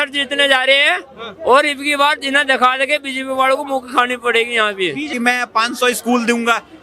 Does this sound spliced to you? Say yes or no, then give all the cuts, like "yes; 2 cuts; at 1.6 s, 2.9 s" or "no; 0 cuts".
yes; 1 cut; at 5.1 s